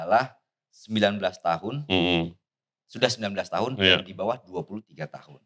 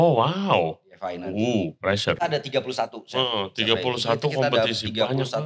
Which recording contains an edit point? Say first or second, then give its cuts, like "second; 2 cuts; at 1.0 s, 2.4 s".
second; 1 cut; at 2.2 s